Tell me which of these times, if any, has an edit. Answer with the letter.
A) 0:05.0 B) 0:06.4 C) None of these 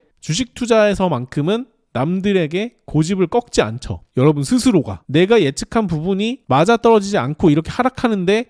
A